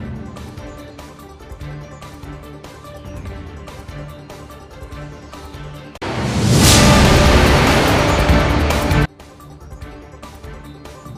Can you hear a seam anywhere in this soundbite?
no; 0 cuts

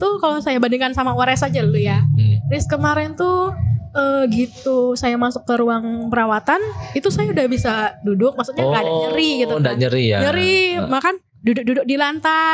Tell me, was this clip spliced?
no; 0 cuts

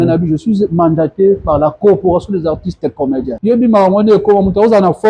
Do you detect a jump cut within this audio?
yes; 1 cut; at 3.3 s

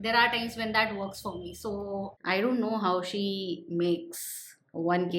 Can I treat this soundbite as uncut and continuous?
no; 1 cut; at 2.1 s

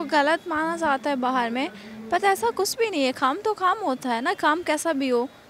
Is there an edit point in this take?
no; 0 cuts

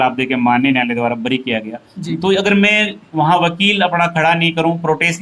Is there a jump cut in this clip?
no; 0 cuts

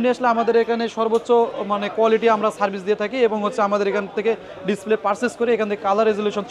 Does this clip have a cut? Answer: no; 0 cuts

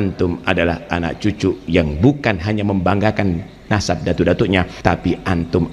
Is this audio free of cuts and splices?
no; 1 cut; at 4.7 s

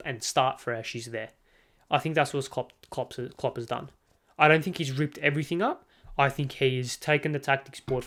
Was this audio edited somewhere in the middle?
no; 0 cuts

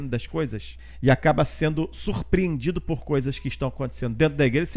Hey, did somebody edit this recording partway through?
no; 0 cuts

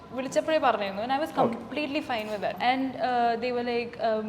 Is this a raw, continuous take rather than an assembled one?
no; 1 cut; at 2.6 s

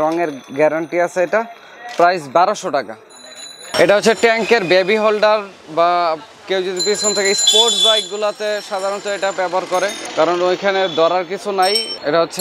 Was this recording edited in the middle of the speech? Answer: no; 0 cuts

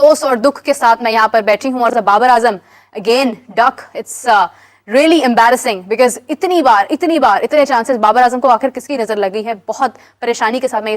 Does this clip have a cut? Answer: no; 0 cuts

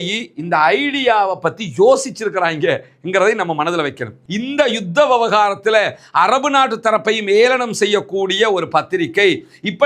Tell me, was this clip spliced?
yes; 1 cut; at 4.2 s

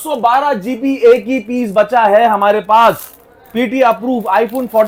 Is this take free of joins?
yes; 0 cuts

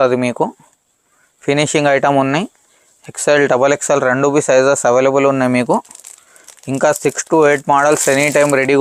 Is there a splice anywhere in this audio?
no; 0 cuts

